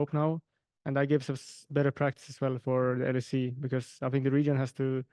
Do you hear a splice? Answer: no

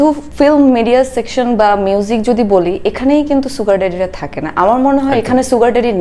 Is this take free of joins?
yes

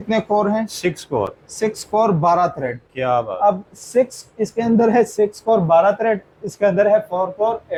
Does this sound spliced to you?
no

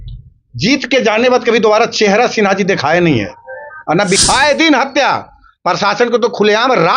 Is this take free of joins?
no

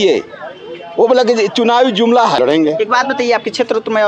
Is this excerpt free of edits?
no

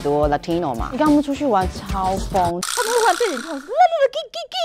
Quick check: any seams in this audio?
yes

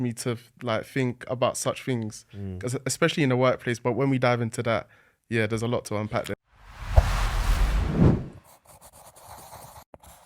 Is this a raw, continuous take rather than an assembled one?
no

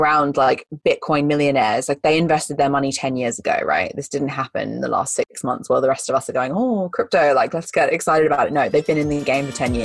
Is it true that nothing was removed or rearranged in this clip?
yes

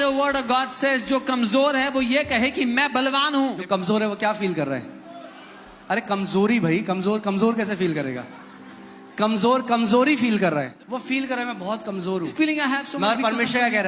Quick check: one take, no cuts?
no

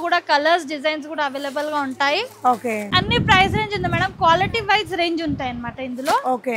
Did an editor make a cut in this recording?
yes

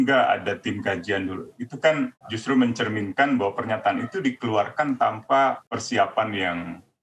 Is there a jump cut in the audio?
no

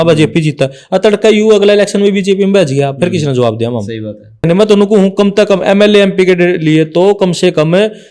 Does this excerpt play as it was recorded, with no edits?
no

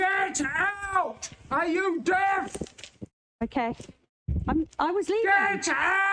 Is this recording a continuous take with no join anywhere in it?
no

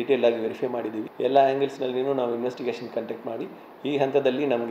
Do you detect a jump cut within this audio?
yes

